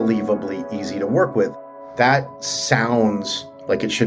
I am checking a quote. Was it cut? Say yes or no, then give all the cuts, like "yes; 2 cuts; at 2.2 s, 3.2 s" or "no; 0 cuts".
yes; 1 cut; at 1.6 s